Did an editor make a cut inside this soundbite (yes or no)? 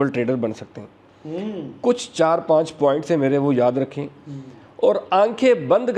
no